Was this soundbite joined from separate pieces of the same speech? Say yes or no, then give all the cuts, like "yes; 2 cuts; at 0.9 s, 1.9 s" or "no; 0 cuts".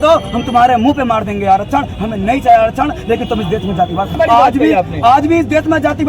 yes; 1 cut; at 4.1 s